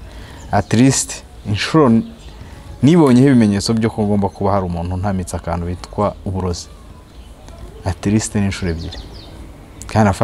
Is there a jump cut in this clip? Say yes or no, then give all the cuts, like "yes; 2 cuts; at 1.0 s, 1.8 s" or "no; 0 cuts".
no; 0 cuts